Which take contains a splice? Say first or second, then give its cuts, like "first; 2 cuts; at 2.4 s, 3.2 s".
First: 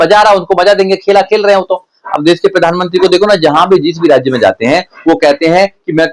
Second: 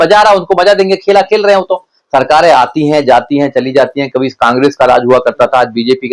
second; 1 cut; at 1.9 s